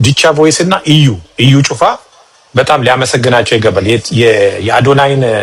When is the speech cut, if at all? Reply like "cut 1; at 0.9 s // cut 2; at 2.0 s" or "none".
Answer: none